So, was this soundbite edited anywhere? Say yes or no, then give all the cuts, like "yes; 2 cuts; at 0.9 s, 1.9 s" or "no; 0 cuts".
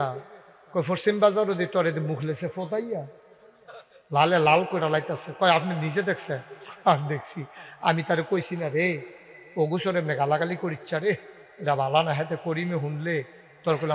no; 0 cuts